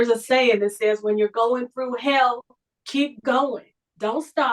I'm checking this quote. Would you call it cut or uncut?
uncut